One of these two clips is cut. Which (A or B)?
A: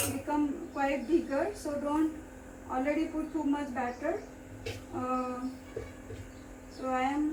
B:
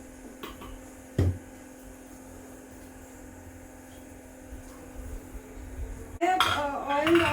B